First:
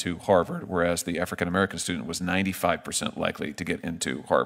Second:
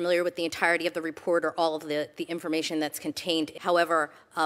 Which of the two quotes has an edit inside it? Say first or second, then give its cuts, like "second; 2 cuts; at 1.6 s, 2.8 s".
second; 1 cut; at 3.5 s